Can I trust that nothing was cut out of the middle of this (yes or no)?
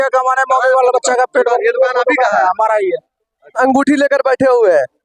yes